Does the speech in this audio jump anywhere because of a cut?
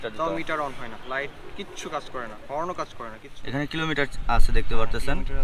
yes; 1 cut; at 3.3 s

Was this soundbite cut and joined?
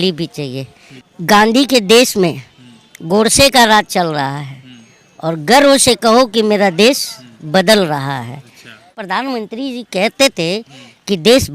yes; 2 cuts; at 1.1 s, 9.0 s

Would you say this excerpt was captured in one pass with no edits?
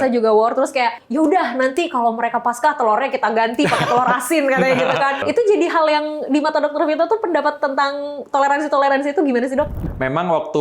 no; 3 cuts; at 1.0 s, 5.2 s, 9.8 s

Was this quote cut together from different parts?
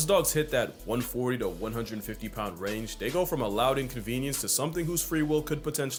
no; 0 cuts

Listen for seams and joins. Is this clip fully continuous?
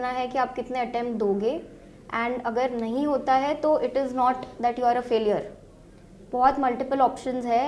yes; 0 cuts

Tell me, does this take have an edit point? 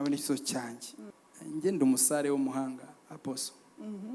yes; 1 cut; at 1.1 s

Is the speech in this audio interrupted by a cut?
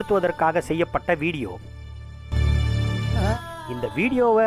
yes; 1 cut; at 3.3 s

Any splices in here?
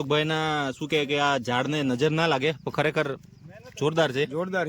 no; 0 cuts

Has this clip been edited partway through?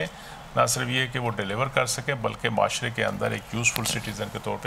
no; 0 cuts

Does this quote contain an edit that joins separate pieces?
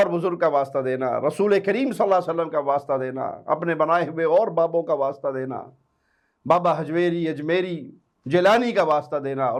no; 0 cuts

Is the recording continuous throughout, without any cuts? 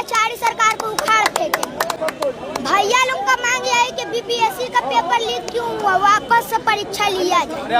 yes; 0 cuts

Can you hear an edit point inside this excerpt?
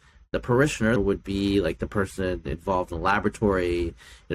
yes; 1 cut; at 1.0 s

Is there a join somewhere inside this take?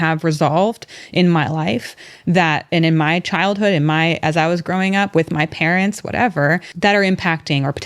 yes; 1 cut; at 6.7 s

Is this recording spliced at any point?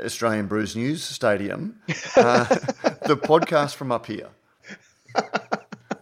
no; 0 cuts

